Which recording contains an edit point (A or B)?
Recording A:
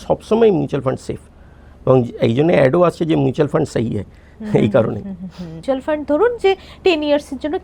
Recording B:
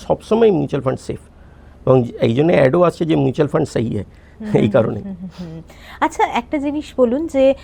A